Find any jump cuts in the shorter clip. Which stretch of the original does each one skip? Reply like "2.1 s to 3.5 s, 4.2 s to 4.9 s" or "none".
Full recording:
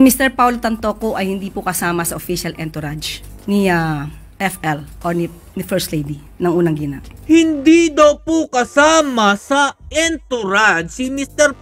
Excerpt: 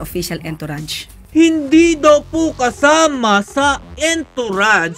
3.3 s to 7.1 s